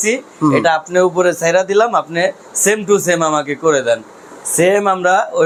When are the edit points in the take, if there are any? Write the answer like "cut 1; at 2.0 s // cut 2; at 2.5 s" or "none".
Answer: none